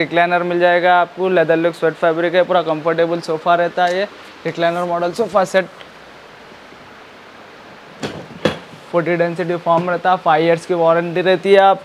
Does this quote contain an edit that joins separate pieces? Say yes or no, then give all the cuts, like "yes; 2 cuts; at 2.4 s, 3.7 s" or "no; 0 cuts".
no; 0 cuts